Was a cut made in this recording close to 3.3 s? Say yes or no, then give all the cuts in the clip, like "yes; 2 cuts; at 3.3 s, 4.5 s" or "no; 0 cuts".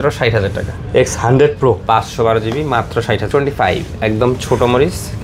yes; 1 cut; at 3.3 s